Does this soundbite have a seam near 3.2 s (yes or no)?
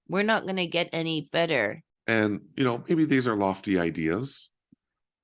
no